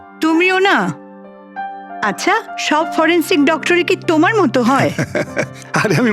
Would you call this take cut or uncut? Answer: cut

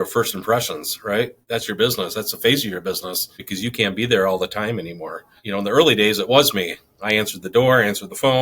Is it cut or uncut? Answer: cut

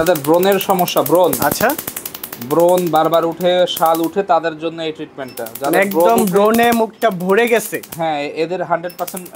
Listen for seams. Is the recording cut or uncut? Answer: uncut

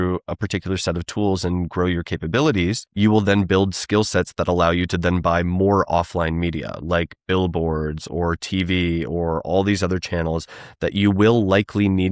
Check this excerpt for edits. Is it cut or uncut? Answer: cut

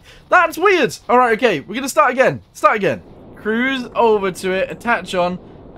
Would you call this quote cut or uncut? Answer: cut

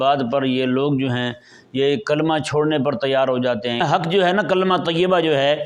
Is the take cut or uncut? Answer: cut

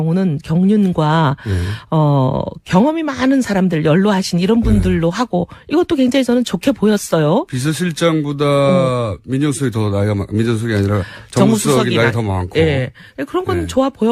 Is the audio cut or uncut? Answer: cut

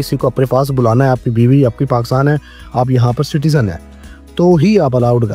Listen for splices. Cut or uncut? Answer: uncut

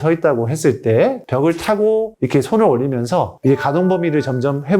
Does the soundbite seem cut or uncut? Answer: cut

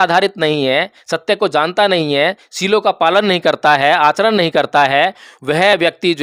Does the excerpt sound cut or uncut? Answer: uncut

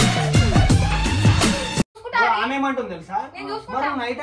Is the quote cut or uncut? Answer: uncut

